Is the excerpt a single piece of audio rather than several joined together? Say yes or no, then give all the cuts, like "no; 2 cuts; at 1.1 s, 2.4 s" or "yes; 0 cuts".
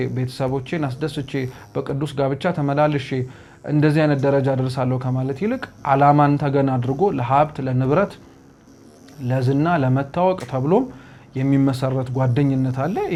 yes; 0 cuts